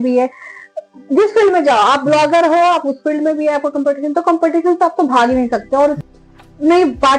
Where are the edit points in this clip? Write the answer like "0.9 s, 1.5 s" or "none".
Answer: 6.0 s